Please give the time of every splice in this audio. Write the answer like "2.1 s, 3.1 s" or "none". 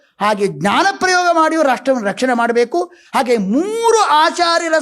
3.0 s

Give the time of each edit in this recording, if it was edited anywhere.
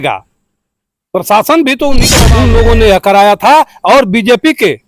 2.1 s

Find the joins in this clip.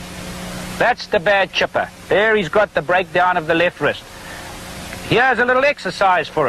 2.0 s

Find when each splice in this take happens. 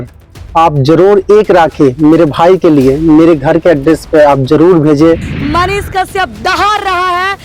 5.3 s

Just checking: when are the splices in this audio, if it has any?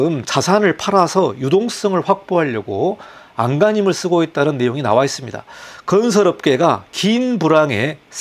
none

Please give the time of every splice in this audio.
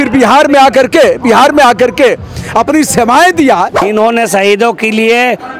3.8 s

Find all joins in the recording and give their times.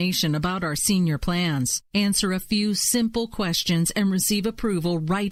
none

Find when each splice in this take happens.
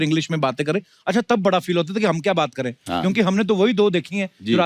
none

